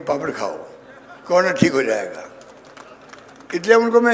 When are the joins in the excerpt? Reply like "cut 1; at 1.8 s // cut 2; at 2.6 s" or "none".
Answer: none

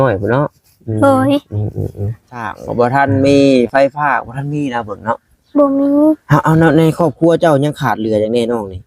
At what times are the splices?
cut 1; at 2.6 s

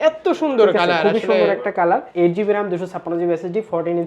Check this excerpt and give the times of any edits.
cut 1; at 2.1 s

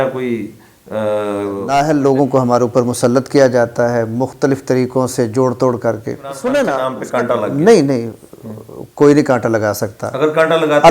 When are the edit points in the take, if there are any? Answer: cut 1; at 1.6 s // cut 2; at 6.3 s

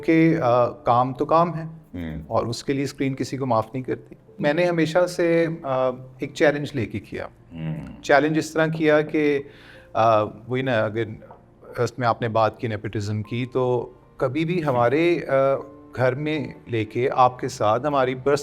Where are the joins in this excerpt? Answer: cut 1; at 4.4 s

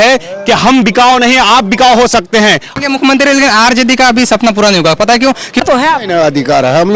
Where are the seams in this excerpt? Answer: cut 1; at 2.7 s // cut 2; at 5.6 s

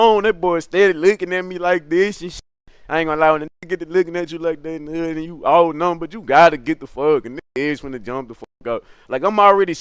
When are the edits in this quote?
none

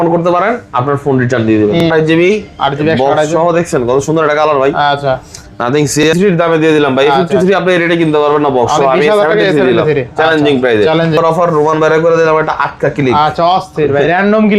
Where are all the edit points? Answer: cut 1; at 1.8 s // cut 2; at 6.1 s // cut 3; at 11.2 s

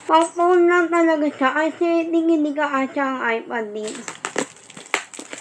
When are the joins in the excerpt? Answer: cut 1; at 4.1 s

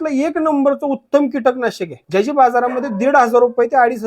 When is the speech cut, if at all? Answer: cut 1; at 1.9 s

